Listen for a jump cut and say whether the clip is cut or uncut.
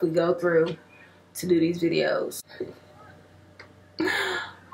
cut